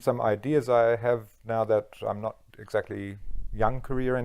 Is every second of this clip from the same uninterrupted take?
yes; 0 cuts

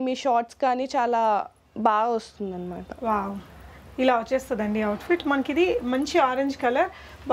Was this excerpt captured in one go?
yes; 0 cuts

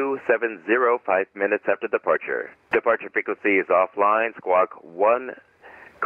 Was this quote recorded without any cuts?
no; 1 cut; at 2.6 s

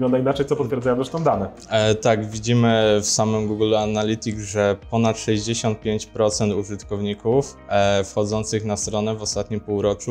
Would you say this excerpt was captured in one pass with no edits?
yes; 0 cuts

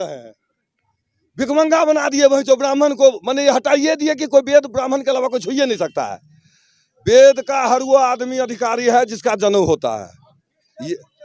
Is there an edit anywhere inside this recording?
no; 0 cuts

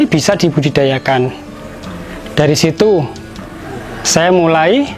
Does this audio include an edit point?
no; 0 cuts

